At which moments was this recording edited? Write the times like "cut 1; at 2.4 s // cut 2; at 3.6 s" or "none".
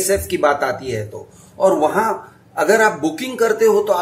none